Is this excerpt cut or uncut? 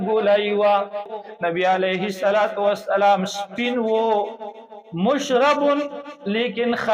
cut